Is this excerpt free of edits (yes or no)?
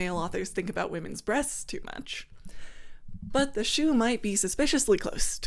yes